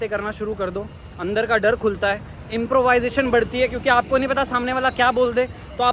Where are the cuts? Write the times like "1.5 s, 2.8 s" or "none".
none